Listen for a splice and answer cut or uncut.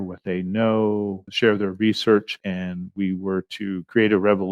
cut